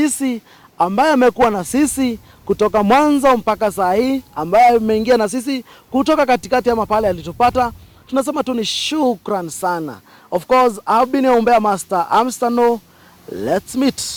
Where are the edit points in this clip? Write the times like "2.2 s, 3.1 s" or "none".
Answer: none